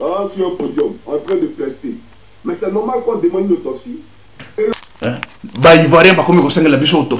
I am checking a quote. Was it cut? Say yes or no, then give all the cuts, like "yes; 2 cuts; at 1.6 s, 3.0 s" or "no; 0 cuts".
yes; 1 cut; at 4.7 s